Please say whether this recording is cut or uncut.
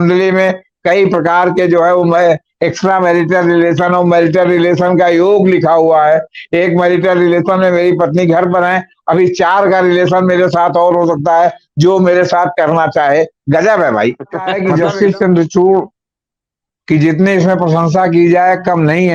cut